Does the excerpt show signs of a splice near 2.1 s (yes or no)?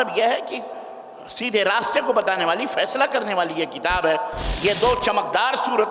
no